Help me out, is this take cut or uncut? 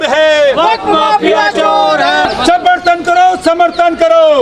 cut